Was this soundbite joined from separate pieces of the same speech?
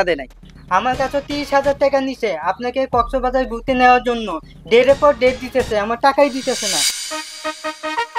yes; 1 cut; at 6.9 s

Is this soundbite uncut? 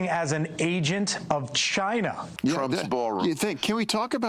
no; 1 cut; at 2.3 s

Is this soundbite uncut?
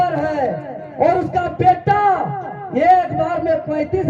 yes; 0 cuts

